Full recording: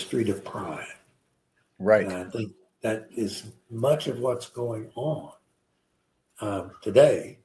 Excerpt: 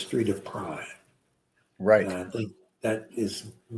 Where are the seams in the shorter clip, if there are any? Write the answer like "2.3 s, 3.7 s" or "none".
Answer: none